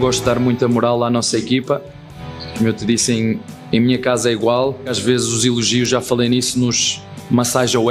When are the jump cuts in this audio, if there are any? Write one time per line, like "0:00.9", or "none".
0:05.0